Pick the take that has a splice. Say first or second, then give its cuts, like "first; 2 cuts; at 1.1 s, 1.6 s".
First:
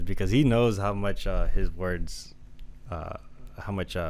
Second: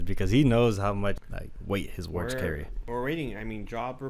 second; 2 cuts; at 1.2 s, 2.7 s